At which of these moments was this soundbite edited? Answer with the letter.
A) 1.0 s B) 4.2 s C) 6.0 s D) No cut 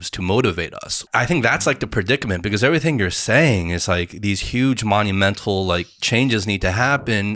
A